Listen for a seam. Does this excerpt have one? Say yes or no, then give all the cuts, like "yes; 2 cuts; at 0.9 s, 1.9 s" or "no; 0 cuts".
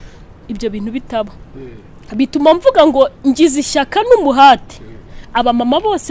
yes; 1 cut; at 1.9 s